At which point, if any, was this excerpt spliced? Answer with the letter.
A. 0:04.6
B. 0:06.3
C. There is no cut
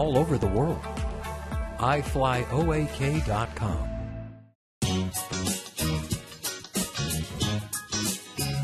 A